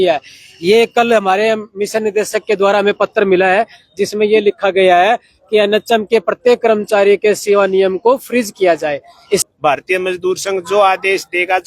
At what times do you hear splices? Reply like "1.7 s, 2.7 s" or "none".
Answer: 9.4 s